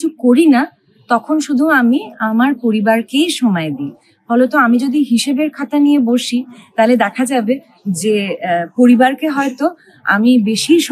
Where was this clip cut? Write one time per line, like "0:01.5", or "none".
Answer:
none